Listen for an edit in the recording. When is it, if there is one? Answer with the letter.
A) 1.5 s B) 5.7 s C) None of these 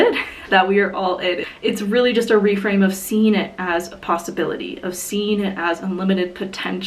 A